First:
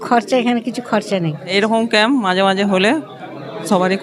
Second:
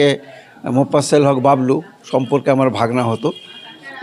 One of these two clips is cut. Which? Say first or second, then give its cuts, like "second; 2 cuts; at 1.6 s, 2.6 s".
first; 1 cut; at 1.5 s